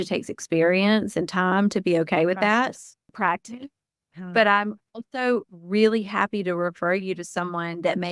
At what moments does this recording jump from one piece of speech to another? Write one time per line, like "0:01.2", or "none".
0:03.1